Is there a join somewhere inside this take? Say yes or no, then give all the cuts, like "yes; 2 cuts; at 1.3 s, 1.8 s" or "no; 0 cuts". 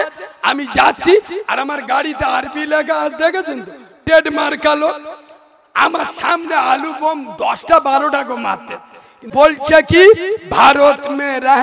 yes; 1 cut; at 9.2 s